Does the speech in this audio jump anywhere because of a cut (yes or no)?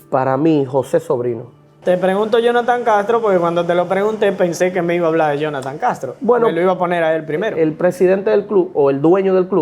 yes